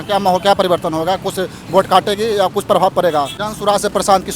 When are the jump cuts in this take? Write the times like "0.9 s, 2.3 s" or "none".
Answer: 3.4 s

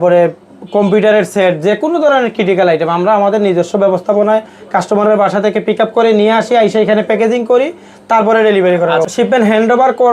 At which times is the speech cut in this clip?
9.1 s

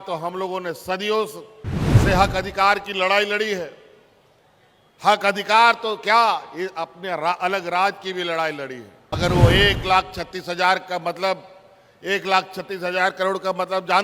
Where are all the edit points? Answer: 9.2 s

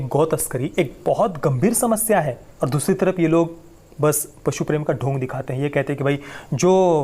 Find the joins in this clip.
2.5 s

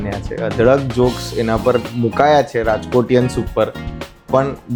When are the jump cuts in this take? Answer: none

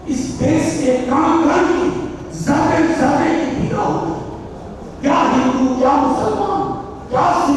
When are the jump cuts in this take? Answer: none

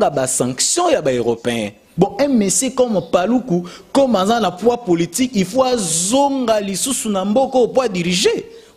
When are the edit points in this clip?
1.8 s

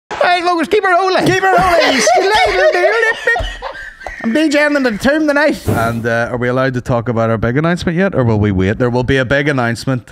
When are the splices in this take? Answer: 5.6 s

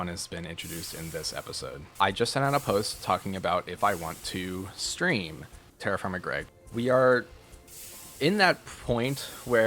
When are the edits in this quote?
1.8 s, 6.5 s

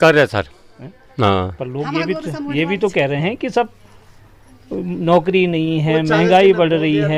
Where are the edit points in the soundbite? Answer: none

